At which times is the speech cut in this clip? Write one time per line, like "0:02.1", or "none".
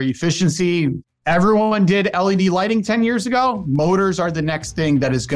0:01.1